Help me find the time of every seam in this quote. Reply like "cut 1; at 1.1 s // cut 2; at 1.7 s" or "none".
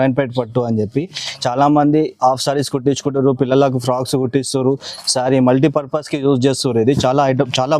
none